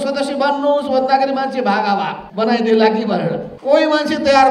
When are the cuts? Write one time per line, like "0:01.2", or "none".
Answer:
0:02.2
0:03.5